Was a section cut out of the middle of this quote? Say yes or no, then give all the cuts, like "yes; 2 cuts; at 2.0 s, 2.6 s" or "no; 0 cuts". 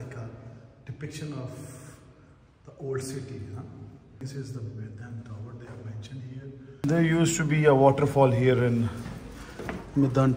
yes; 2 cuts; at 4.2 s, 6.8 s